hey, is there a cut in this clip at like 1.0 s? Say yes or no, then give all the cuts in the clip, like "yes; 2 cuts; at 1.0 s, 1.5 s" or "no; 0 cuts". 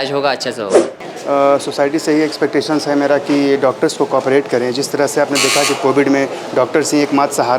yes; 1 cut; at 1.0 s